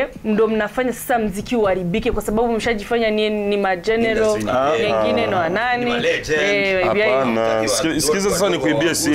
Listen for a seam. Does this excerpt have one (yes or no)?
no